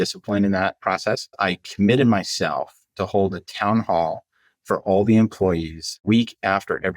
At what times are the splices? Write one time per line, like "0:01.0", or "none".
0:01.3
0:06.0

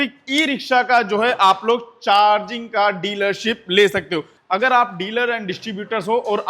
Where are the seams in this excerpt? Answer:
0:04.3

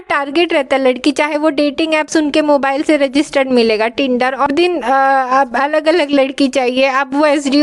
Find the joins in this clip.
0:04.5

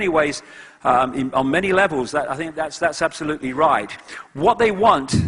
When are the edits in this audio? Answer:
none

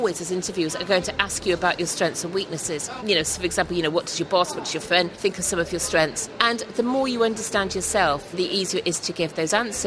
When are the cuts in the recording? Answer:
0:02.9
0:05.1
0:06.3
0:08.3

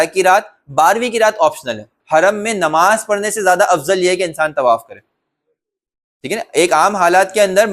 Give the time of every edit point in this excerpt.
0:01.9

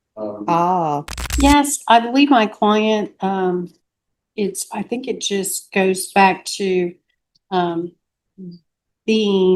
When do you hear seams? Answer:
0:01.2

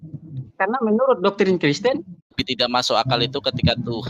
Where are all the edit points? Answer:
0:02.4

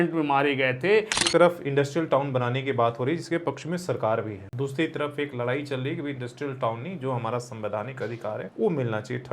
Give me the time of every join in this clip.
0:01.2
0:04.4
0:08.5

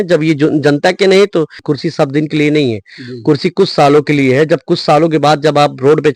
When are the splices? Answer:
0:01.6

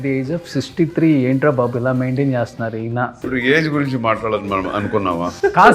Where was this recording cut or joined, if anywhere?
0:03.3

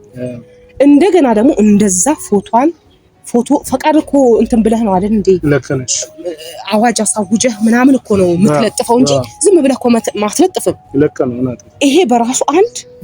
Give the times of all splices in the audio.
0:11.6

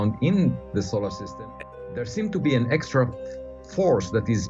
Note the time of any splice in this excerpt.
0:01.4

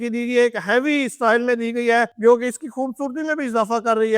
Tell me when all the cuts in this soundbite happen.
none

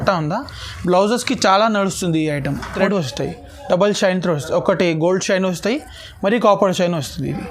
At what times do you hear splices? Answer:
0:02.7

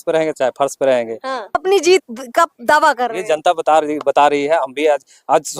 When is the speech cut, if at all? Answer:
0:01.5

